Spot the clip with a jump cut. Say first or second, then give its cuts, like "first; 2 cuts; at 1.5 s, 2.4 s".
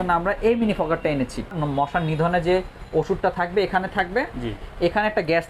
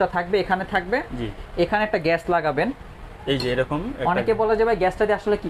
first; 1 cut; at 1.6 s